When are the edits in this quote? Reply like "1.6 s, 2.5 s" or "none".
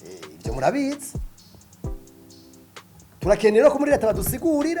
1.1 s, 3.2 s